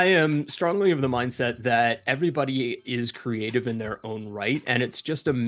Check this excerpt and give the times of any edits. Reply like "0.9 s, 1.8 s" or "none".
none